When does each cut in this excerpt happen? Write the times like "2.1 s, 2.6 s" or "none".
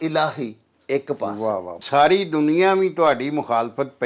1.8 s